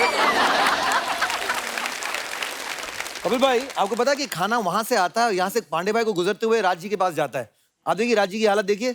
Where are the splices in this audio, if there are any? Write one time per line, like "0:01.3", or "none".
none